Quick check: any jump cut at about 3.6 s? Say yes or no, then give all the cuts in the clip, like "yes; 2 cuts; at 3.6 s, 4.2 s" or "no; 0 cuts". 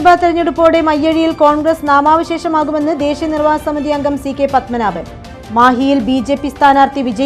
no; 0 cuts